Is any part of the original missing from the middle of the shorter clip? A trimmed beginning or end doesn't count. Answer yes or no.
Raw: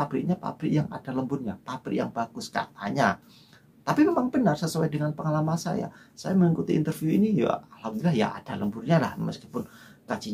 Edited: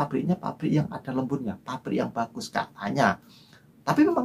no